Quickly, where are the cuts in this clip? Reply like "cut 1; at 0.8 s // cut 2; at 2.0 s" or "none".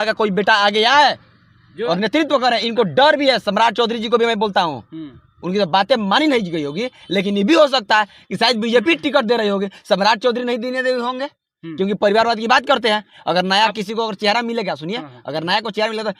none

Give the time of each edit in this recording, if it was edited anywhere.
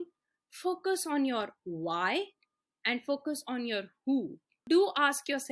cut 1; at 4.6 s

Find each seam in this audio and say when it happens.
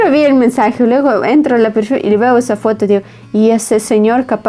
none

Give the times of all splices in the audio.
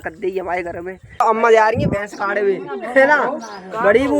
cut 1; at 1.2 s

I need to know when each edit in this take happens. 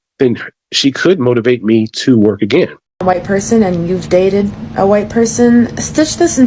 cut 1; at 2.9 s

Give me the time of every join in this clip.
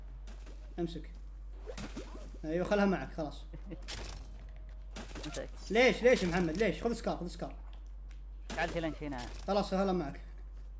none

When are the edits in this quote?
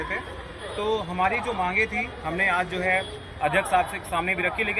none

